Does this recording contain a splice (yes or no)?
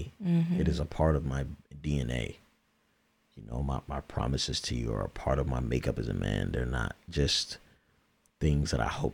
no